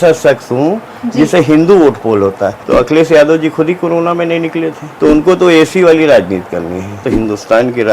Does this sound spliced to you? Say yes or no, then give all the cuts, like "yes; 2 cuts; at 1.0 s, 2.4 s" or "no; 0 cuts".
yes; 3 cuts; at 2.6 s, 4.8 s, 7.0 s